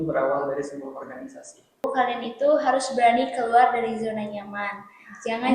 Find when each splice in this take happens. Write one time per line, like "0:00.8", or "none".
0:01.8